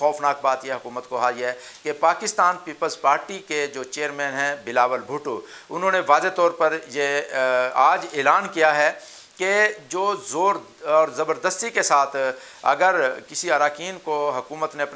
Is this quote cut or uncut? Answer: uncut